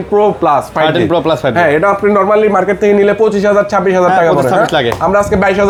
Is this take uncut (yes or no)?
yes